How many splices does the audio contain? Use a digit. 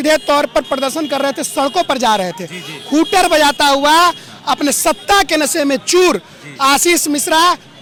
0